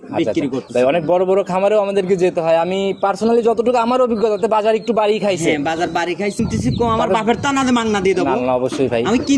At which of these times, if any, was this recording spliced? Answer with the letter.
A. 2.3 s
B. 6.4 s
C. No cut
B